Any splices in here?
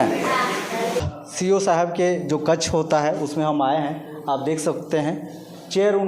yes; 1 cut; at 1.1 s

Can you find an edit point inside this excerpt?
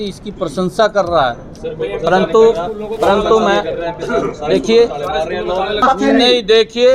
yes; 1 cut; at 5.8 s

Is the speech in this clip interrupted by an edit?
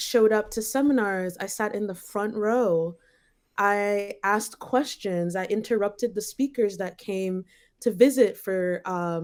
no; 0 cuts

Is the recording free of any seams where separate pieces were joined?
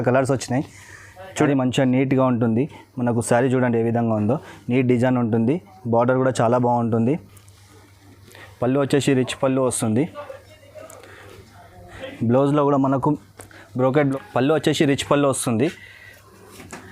no; 2 cuts; at 1.5 s, 14.0 s

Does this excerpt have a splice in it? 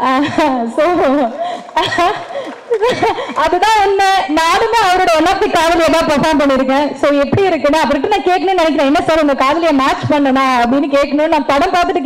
no; 0 cuts

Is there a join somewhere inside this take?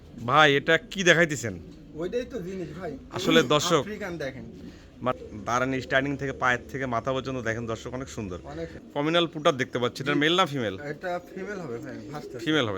yes; 2 cuts; at 5.1 s, 8.8 s

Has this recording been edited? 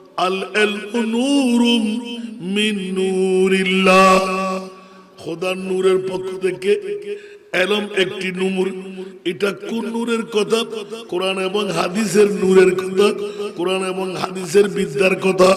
no; 0 cuts

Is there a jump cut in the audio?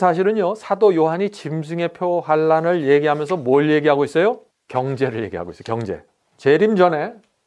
yes; 2 cuts; at 4.5 s, 6.3 s

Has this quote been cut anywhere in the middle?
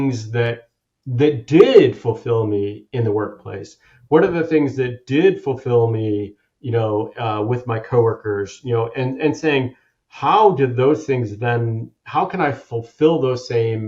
no; 0 cuts

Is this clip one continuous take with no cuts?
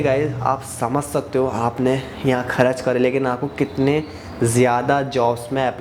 yes; 0 cuts

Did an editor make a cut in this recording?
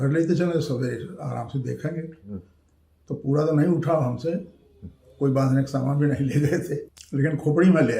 yes; 1 cut; at 6.9 s

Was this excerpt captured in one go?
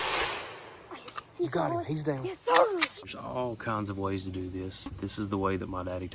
no; 2 cuts; at 3.1 s, 4.9 s

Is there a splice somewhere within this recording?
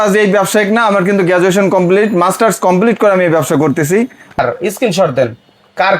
yes; 1 cut; at 4.4 s

